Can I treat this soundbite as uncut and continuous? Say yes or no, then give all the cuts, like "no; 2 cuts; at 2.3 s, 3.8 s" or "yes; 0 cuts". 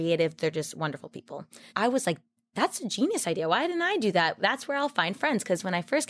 no; 1 cut; at 1.6 s